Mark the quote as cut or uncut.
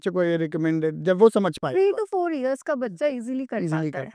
uncut